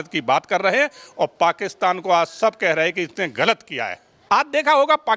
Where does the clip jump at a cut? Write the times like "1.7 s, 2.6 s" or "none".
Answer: 4.1 s